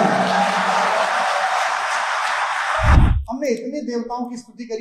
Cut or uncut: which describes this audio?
cut